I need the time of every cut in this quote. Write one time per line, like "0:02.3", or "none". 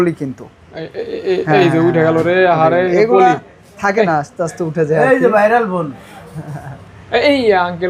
none